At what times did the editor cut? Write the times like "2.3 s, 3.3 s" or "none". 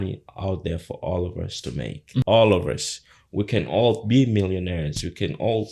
2.2 s